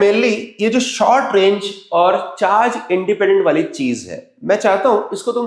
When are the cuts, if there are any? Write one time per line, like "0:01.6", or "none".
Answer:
none